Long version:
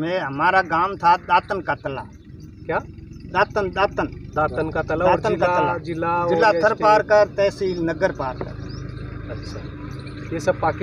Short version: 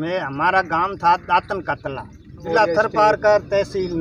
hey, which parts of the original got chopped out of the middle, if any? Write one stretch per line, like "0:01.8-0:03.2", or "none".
0:02.5-0:06.3